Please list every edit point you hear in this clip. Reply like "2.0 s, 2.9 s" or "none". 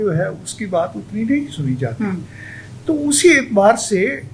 none